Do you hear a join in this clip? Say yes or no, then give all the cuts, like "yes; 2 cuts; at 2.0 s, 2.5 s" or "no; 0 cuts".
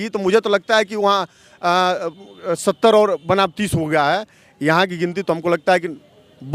no; 0 cuts